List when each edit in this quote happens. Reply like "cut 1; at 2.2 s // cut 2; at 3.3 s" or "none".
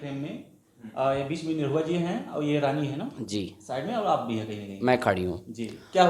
none